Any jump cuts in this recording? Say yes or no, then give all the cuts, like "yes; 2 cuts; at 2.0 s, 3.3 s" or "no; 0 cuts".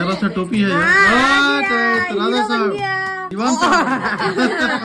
no; 0 cuts